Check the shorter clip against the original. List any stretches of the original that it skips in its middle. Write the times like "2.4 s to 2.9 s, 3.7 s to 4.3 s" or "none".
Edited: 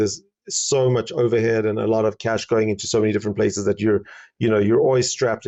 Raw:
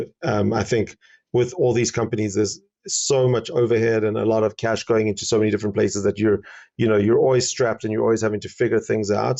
none